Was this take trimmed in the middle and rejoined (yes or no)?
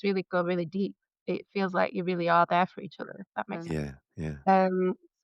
yes